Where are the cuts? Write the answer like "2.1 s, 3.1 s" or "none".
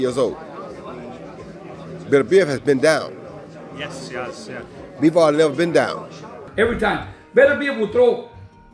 6.4 s